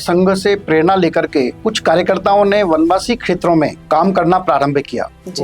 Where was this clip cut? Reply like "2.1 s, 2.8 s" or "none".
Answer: 1.6 s, 3.8 s